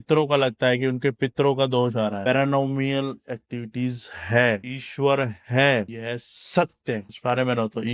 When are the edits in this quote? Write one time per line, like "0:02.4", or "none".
0:02.2